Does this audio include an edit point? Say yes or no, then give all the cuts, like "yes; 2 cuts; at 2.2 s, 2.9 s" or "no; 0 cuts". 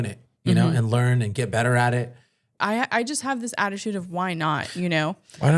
yes; 1 cut; at 2.4 s